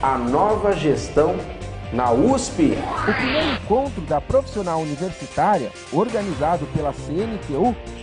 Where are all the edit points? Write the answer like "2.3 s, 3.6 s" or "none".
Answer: 2.9 s